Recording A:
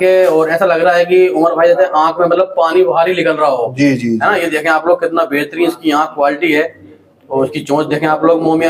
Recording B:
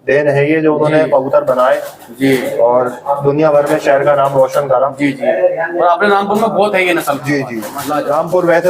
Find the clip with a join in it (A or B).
B